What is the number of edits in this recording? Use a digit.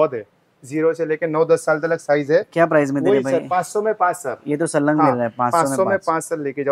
0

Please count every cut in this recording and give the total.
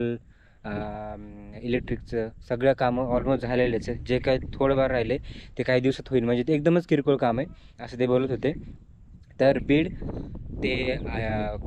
0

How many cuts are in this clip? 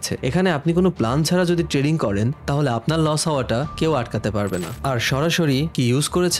1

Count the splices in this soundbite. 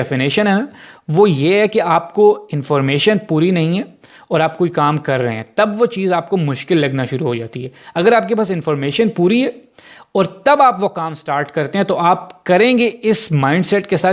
0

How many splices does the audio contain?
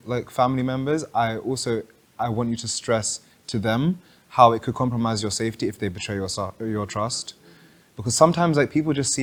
0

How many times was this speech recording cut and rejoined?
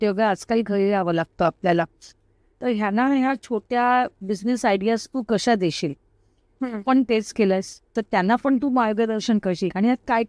1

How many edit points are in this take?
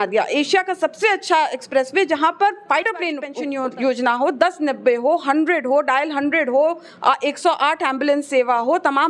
1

